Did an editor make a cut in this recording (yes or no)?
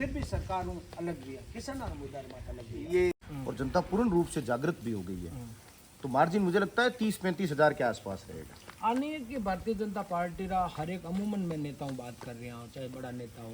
yes